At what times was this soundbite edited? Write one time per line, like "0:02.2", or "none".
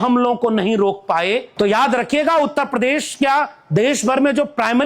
0:01.5